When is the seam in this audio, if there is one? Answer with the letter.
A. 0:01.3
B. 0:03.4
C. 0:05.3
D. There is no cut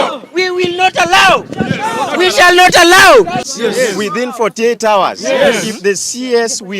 B